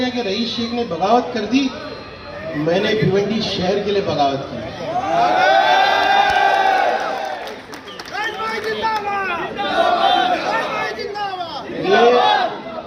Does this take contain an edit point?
no; 0 cuts

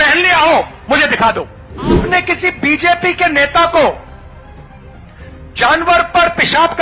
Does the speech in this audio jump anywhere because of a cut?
yes; 1 cut; at 2.0 s

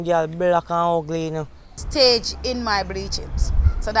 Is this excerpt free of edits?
no; 1 cut; at 1.8 s

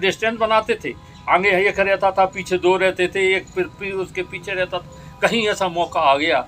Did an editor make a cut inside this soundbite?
no; 0 cuts

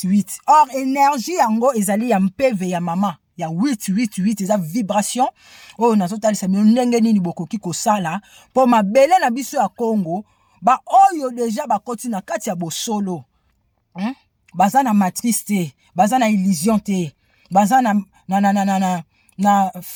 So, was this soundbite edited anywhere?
no; 0 cuts

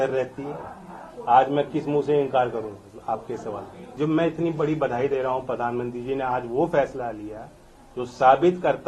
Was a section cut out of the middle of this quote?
yes; 1 cut; at 3.9 s

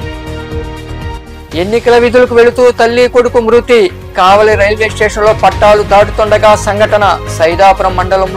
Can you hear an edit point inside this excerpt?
yes; 1 cut; at 1.2 s

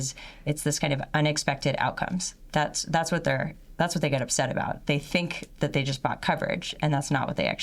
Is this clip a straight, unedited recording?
yes; 0 cuts

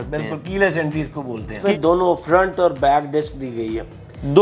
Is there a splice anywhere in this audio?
yes; 1 cut; at 1.6 s

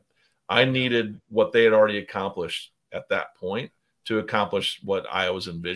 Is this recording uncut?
no; 1 cut; at 4.8 s

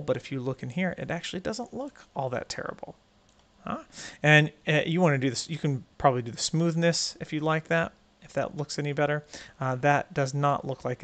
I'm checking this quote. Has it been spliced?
no; 0 cuts

